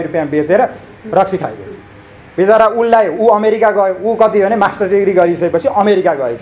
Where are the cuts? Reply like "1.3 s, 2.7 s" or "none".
none